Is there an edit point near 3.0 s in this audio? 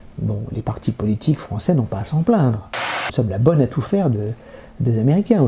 yes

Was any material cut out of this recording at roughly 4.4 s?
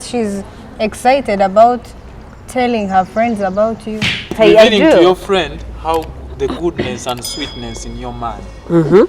yes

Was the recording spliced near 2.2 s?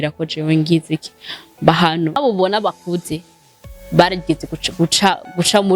yes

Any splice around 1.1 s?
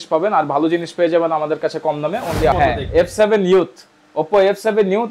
no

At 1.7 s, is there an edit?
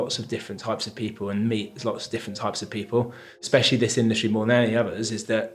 no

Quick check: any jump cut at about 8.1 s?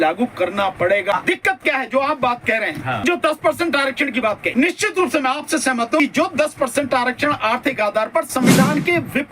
no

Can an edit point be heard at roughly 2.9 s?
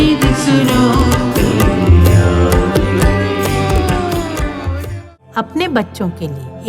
no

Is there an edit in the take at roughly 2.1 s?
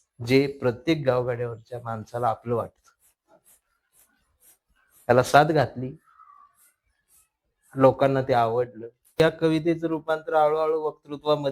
no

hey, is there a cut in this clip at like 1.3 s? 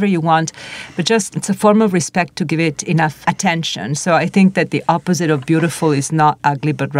yes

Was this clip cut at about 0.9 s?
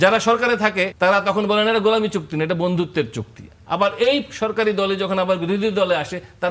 yes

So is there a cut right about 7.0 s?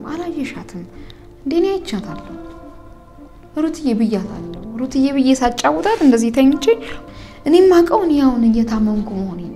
yes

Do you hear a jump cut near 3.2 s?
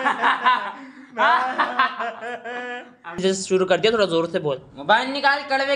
yes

